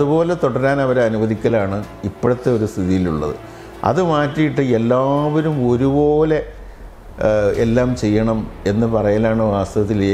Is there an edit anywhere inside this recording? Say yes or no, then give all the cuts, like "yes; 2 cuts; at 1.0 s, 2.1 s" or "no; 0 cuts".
no; 0 cuts